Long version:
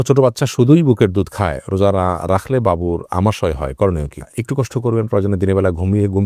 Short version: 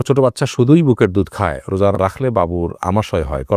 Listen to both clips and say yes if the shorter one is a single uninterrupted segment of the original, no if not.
no